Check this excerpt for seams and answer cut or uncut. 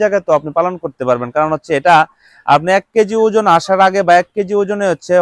uncut